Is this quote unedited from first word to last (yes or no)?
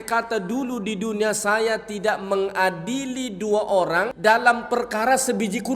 no